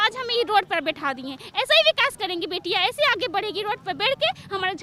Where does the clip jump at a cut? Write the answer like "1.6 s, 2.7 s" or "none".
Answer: none

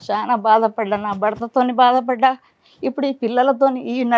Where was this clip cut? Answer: none

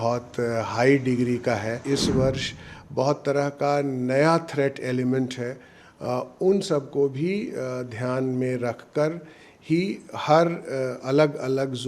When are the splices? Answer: 1.8 s

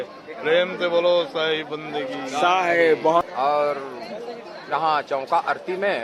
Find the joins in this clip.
3.3 s

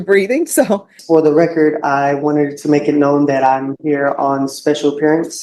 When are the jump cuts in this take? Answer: 1.0 s

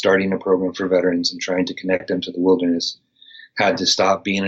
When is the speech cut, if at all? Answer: none

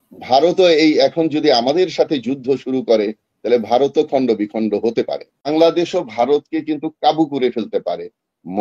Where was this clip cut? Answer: 5.5 s

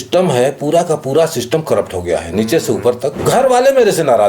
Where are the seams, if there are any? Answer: 3.2 s

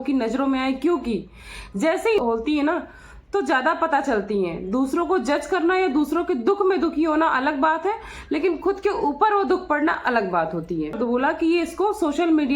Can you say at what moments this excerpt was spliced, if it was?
2.2 s, 11.0 s

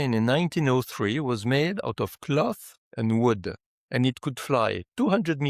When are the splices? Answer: none

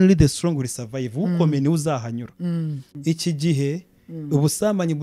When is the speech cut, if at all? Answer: 2.9 s

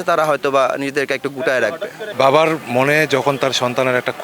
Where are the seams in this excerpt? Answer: 2.0 s

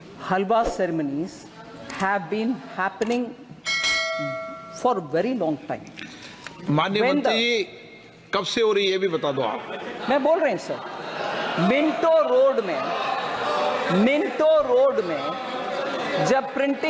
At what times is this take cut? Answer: none

